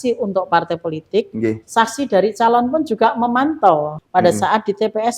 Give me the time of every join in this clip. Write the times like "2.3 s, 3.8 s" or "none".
4.0 s

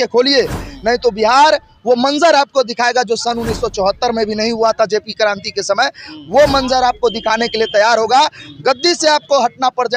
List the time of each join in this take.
none

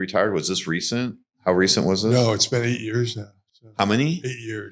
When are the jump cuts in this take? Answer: none

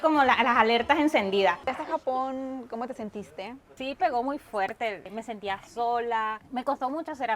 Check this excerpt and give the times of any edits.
1.8 s, 3.7 s, 6.4 s

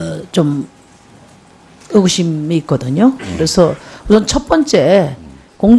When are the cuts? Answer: none

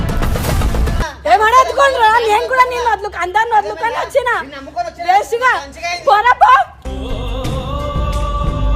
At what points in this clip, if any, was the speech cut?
1.0 s

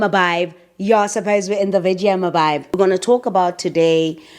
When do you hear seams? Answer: 2.8 s

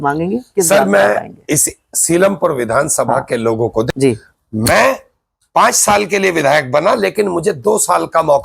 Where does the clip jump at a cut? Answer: 3.9 s

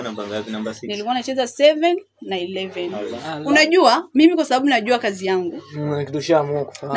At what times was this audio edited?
3.3 s

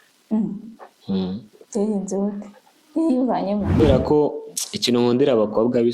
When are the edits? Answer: 3.8 s

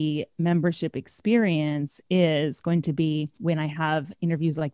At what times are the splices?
3.3 s

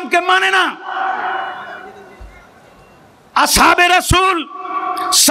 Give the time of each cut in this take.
none

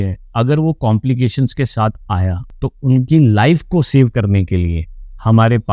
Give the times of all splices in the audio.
2.5 s

